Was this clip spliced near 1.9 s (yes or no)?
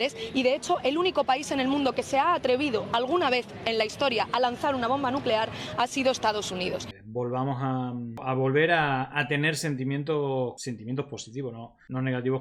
no